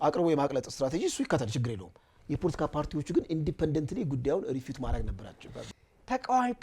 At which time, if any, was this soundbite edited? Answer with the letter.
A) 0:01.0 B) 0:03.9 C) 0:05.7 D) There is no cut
C